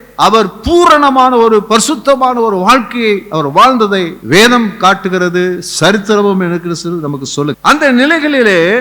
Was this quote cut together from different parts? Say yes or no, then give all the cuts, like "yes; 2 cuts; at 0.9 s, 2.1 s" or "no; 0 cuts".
yes; 2 cuts; at 4.2 s, 7.6 s